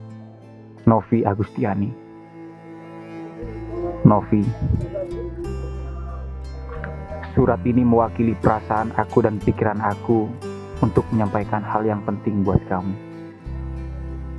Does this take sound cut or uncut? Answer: uncut